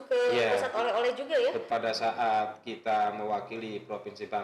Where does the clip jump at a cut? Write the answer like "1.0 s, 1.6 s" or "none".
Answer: 1.6 s